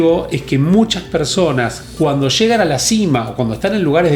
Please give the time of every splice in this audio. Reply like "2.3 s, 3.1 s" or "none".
none